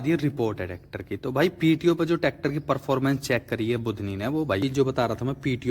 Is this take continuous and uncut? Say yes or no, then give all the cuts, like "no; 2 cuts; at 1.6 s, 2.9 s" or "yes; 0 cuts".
no; 1 cut; at 4.6 s